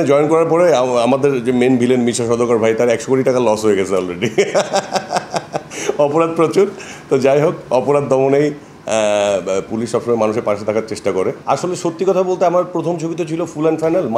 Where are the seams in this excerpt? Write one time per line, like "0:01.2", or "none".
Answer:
none